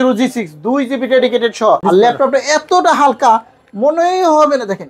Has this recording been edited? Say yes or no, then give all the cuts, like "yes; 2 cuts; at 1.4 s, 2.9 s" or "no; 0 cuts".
yes; 1 cut; at 1.8 s